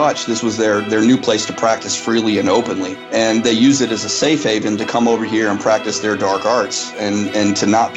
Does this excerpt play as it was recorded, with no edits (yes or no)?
no